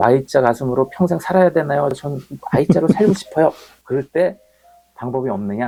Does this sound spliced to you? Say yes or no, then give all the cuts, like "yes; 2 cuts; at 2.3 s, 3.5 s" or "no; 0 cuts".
no; 0 cuts